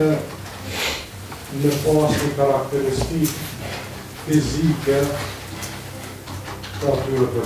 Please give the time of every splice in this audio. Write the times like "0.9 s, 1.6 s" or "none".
none

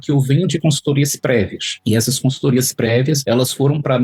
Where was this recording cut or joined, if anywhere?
none

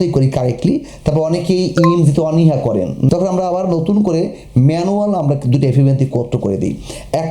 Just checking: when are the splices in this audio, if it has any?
3.1 s

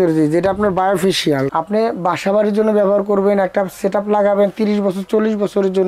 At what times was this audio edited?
1.5 s

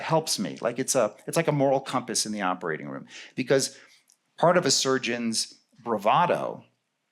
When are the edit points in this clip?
none

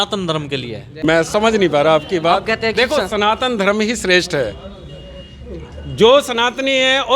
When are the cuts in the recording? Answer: 1.0 s

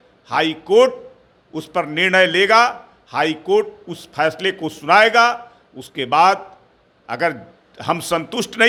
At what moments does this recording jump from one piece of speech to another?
none

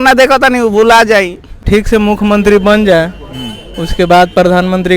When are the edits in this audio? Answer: 1.6 s

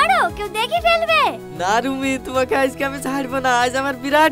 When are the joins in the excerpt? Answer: none

